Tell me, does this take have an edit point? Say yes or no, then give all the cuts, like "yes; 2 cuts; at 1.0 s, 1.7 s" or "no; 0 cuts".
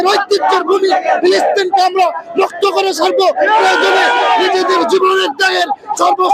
no; 0 cuts